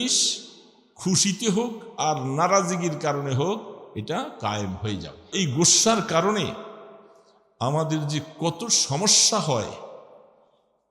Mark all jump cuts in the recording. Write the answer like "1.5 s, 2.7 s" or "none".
5.3 s

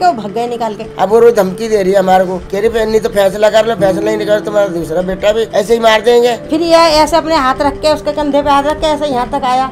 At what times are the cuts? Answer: 0.8 s, 6.4 s

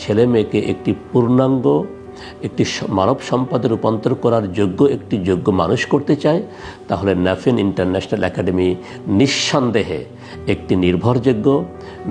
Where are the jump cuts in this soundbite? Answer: none

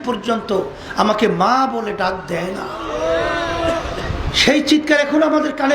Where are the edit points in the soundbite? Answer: none

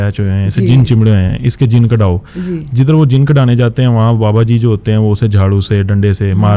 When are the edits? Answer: none

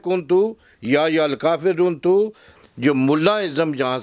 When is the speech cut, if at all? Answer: 2.5 s

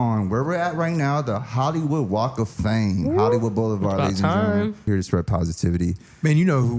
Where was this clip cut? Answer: 4.9 s

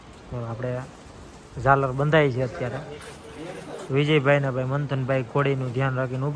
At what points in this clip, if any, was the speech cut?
3.8 s

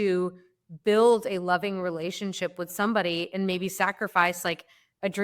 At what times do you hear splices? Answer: none

